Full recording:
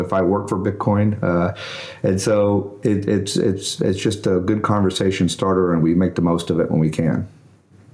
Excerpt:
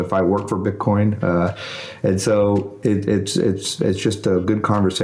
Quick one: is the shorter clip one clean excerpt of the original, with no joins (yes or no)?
yes